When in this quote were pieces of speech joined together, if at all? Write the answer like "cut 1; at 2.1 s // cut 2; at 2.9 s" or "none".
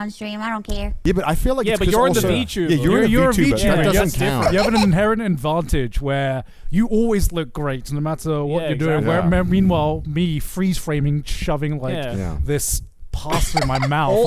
cut 1; at 0.9 s